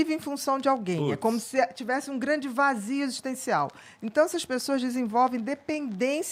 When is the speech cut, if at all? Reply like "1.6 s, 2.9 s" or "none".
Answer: none